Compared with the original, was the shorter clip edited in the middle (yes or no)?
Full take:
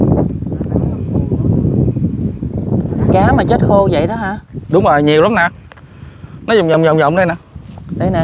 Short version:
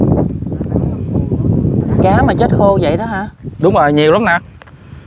yes